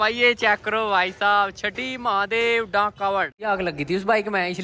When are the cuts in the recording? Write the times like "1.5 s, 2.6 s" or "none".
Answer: 3.3 s